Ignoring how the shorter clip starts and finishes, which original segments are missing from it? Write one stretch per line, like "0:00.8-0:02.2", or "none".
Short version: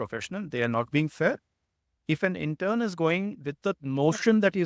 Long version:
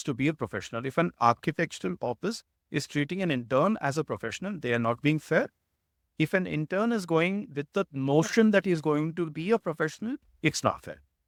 none